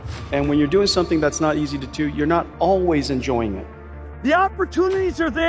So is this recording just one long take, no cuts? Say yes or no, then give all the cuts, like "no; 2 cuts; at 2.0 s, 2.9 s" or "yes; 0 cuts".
no; 1 cut; at 4.0 s